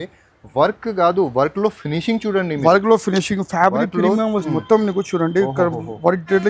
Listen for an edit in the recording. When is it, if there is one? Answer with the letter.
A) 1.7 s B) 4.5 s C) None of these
B